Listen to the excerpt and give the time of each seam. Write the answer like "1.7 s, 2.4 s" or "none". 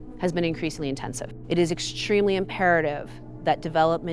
1.3 s